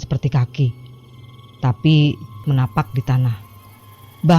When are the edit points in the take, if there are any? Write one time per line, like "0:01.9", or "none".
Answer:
0:02.4